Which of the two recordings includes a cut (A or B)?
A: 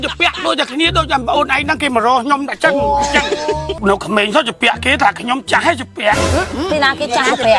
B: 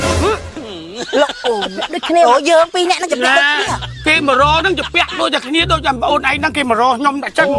A